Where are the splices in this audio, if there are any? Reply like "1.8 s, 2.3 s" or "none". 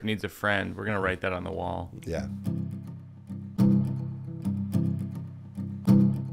2.3 s